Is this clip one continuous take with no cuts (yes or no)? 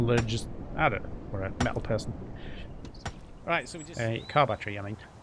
no